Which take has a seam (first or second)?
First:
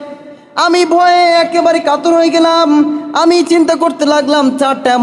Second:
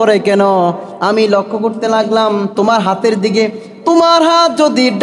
second